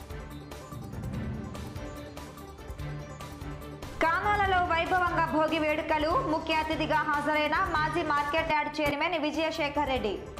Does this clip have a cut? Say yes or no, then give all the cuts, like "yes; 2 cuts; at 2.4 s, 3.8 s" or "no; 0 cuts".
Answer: yes; 1 cut; at 1.5 s